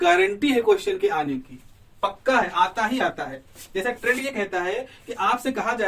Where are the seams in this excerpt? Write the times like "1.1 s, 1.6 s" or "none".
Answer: none